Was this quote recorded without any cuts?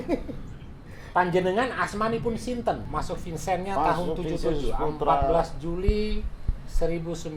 no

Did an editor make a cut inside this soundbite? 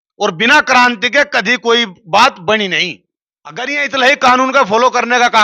yes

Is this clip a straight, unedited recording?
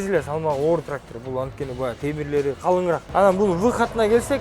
no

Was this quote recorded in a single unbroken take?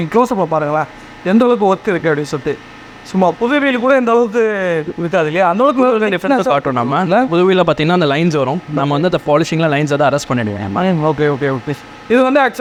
yes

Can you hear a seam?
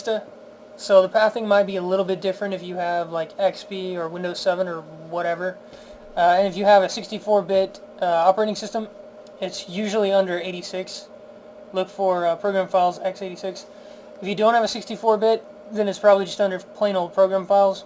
no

